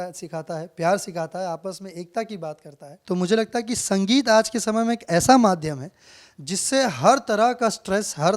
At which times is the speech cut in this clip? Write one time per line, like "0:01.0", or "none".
0:02.9